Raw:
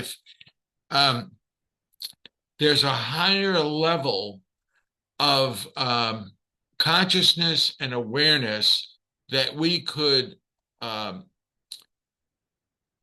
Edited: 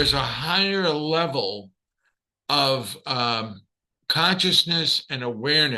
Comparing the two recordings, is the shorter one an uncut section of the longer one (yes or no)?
yes